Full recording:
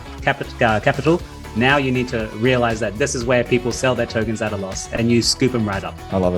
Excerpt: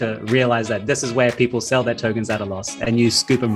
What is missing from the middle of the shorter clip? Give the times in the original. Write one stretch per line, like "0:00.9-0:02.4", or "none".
none